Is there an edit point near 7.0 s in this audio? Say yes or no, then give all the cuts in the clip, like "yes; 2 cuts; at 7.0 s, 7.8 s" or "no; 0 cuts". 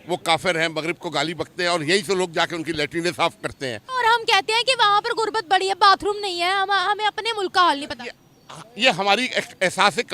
no; 1 cut; at 3.8 s